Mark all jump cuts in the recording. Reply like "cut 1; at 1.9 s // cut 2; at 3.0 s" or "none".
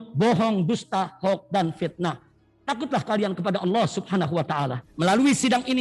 cut 1; at 4.8 s

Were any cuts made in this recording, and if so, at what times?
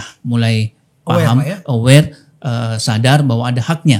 none

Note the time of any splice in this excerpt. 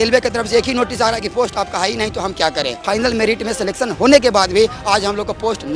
cut 1; at 2.8 s

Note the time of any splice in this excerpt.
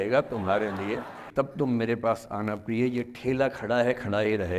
cut 1; at 1.2 s

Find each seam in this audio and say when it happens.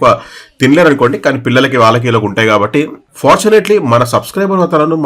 cut 1; at 3.0 s

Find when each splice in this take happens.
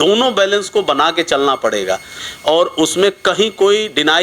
cut 1; at 2.2 s

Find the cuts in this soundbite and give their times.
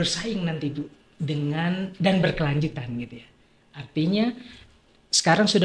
none

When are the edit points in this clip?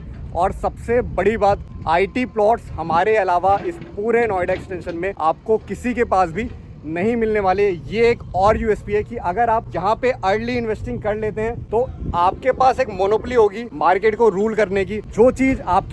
cut 1; at 1.7 s // cut 2; at 5.1 s // cut 3; at 9.7 s // cut 4; at 11.6 s // cut 5; at 13.7 s // cut 6; at 15.0 s

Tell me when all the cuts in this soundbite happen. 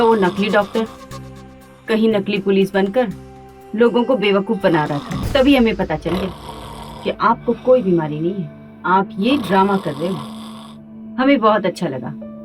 cut 1; at 5.2 s

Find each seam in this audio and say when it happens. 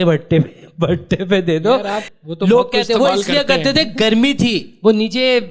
cut 1; at 2.0 s

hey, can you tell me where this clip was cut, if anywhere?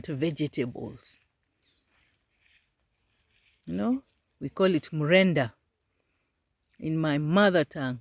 none

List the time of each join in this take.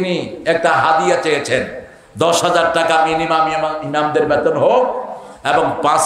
none

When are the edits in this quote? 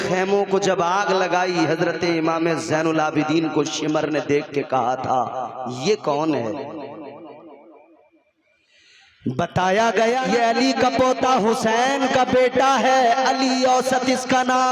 cut 1; at 10.2 s

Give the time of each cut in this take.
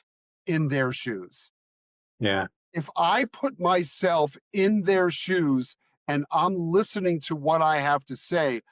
none

